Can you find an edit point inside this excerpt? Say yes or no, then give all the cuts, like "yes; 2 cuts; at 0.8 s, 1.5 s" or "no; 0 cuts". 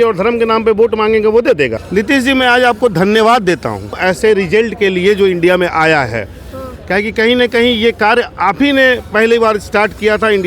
yes; 2 cuts; at 1.8 s, 4.0 s